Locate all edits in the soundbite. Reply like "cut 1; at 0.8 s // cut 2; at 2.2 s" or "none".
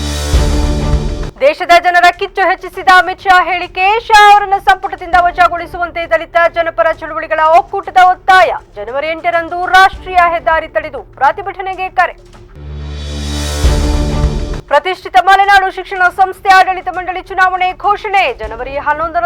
none